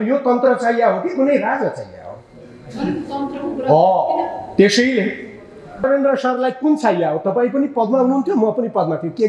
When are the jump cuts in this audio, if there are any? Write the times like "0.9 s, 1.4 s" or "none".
5.8 s